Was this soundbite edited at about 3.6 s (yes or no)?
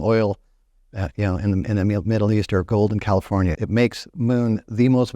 yes